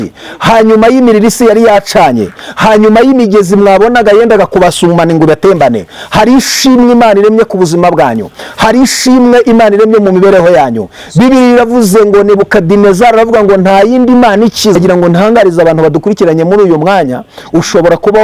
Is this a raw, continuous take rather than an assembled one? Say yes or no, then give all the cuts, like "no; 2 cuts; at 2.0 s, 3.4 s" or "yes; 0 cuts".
no; 1 cut; at 14.8 s